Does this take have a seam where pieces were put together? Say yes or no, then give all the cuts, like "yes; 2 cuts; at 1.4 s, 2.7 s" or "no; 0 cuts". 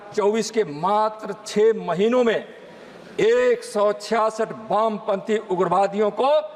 no; 0 cuts